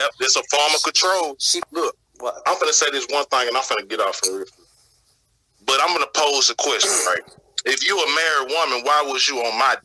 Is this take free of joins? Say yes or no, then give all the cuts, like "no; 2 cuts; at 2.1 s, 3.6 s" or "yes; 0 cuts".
no; 1 cut; at 1.6 s